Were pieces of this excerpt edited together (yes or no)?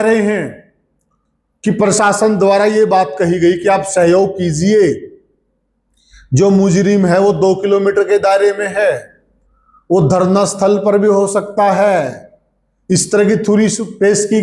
no